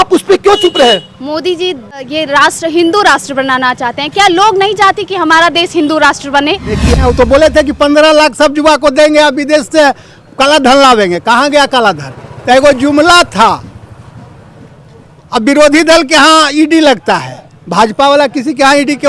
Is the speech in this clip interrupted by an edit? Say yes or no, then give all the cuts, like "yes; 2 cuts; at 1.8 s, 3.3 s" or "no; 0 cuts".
yes; 2 cuts; at 2.0 s, 7.0 s